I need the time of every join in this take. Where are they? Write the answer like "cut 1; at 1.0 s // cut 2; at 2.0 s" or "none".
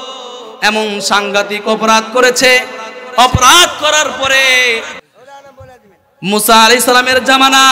cut 1; at 5.0 s